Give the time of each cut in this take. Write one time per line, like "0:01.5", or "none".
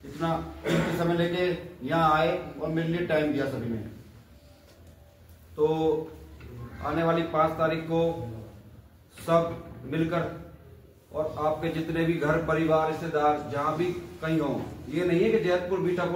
none